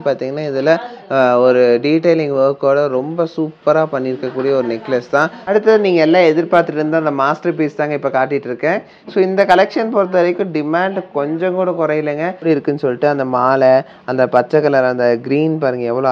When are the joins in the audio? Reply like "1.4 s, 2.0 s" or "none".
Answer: 5.4 s, 12.4 s